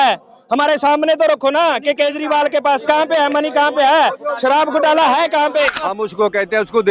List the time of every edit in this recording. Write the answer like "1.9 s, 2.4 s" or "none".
5.8 s

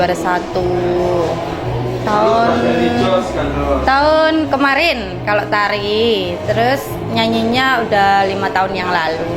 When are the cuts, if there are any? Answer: none

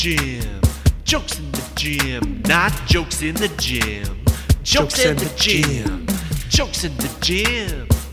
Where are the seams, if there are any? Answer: none

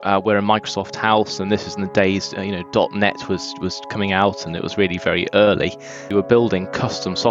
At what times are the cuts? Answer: 6.1 s

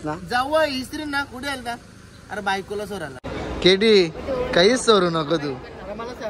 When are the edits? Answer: 3.2 s

